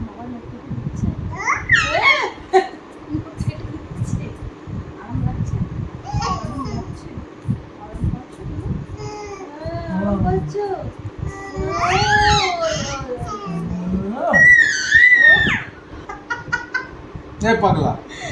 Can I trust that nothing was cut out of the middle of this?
no; 1 cut; at 15.9 s

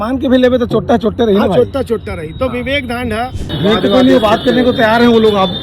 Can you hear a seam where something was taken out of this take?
yes; 1 cut; at 3.4 s

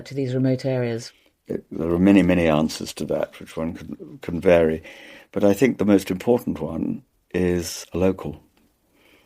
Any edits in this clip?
yes; 1 cut; at 1.1 s

